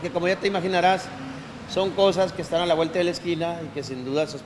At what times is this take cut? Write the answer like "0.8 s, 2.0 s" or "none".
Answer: 2.4 s